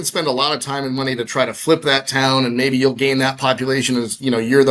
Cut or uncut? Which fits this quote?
uncut